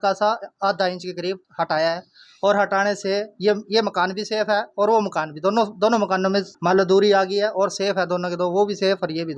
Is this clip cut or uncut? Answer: uncut